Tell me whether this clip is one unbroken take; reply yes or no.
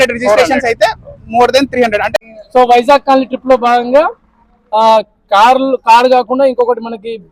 no